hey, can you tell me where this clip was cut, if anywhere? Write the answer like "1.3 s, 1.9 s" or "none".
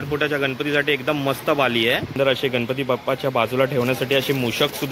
2.1 s

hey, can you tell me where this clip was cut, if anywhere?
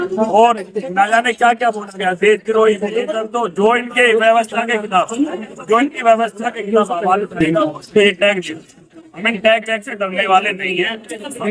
3.2 s

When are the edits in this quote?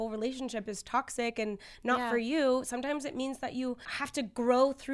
3.9 s

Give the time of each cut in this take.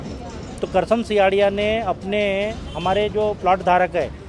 none

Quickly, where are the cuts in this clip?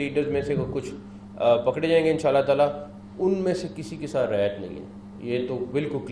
none

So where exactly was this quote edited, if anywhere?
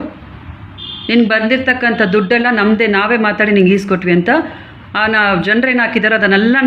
none

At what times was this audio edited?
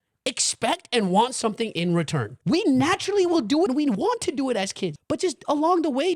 2.3 s, 3.7 s, 4.9 s

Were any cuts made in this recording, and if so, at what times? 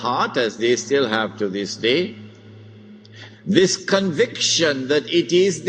none

